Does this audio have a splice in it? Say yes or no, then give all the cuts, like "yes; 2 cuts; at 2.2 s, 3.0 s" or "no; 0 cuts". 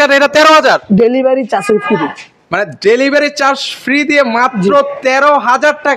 no; 0 cuts